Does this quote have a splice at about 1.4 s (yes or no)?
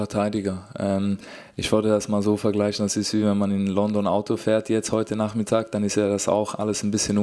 no